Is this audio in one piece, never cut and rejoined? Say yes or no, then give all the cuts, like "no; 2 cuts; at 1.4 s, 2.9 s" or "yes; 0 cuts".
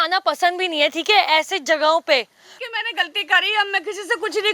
no; 1 cut; at 2.5 s